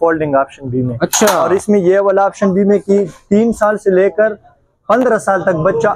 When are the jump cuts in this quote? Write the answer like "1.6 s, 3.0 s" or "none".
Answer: none